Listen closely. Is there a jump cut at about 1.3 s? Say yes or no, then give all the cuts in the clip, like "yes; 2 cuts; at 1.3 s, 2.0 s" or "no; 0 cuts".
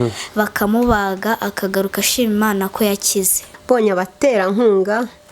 no; 1 cut; at 3.5 s